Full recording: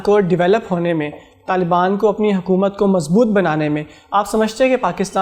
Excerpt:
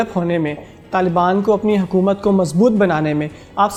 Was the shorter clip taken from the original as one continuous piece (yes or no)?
yes